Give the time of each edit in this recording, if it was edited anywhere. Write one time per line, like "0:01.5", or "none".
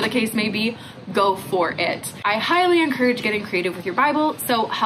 0:02.2